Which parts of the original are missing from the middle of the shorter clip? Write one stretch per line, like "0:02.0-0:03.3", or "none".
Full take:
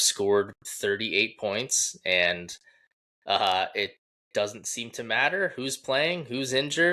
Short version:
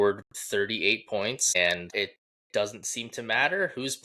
0:02.1-0:03.6